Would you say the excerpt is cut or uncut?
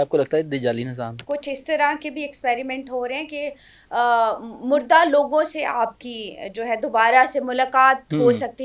cut